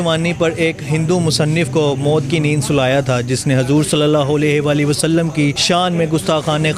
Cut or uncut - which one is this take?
cut